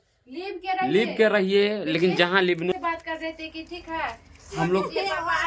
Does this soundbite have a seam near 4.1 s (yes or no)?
no